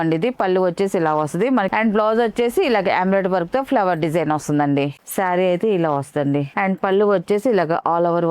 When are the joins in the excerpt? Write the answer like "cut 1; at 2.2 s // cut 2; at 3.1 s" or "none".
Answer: cut 1; at 1.7 s // cut 2; at 5.0 s // cut 3; at 6.5 s